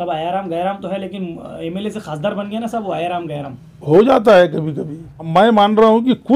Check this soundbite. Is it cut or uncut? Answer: cut